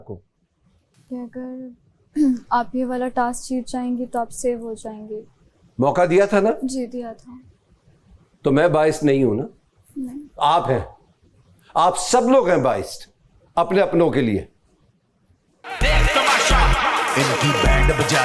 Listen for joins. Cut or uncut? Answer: cut